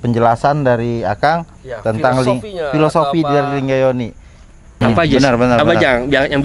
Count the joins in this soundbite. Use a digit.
1